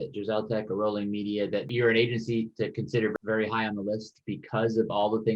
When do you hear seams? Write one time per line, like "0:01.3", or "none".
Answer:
none